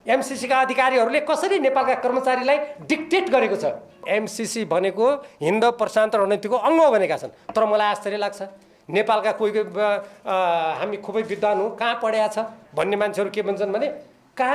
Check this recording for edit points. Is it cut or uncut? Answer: cut